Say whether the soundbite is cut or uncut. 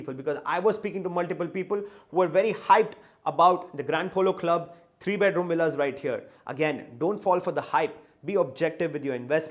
uncut